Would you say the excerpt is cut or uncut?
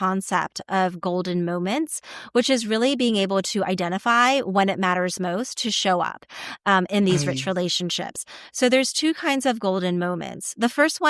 uncut